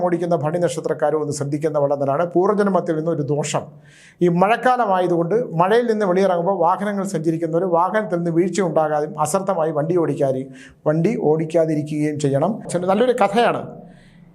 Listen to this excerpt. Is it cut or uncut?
cut